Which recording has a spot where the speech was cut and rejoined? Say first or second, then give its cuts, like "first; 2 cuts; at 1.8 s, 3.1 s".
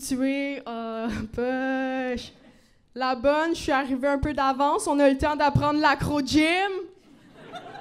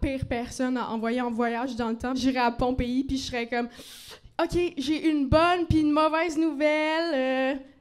second; 1 cut; at 2.2 s